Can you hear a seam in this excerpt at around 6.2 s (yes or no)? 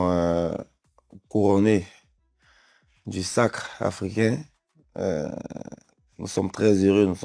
no